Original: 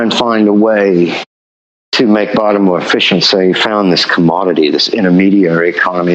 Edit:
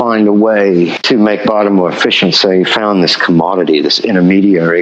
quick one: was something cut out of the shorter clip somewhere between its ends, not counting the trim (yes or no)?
yes